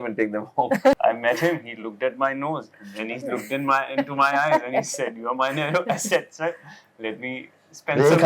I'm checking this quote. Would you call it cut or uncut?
cut